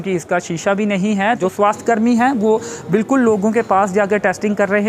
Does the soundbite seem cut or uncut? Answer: cut